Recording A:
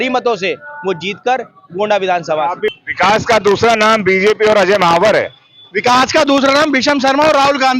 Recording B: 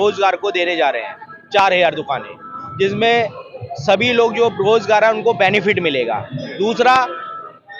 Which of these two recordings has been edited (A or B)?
A